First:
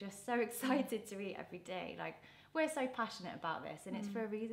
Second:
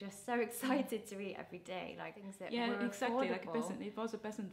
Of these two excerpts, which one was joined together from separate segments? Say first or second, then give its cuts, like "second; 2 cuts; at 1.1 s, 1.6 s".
second; 1 cut; at 2.2 s